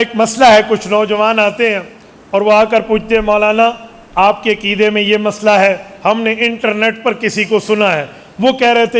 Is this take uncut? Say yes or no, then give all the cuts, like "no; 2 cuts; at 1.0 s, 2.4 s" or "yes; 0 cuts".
yes; 0 cuts